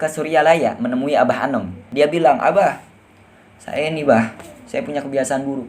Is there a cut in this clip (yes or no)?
yes